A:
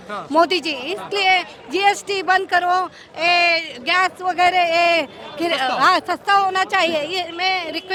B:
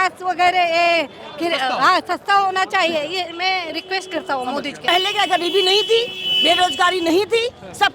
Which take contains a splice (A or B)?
B